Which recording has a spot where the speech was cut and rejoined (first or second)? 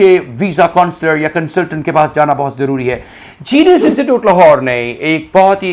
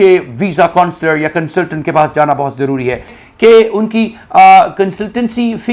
second